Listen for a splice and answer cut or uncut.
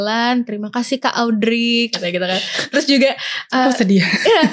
uncut